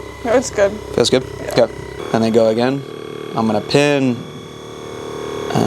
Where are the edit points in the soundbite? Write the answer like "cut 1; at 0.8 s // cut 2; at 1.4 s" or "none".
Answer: cut 1; at 2.0 s